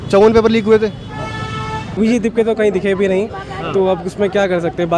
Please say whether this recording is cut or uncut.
cut